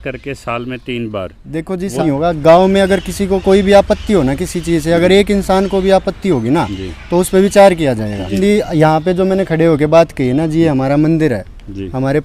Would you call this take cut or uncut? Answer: cut